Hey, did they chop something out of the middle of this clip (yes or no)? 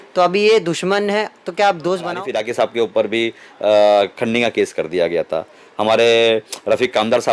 yes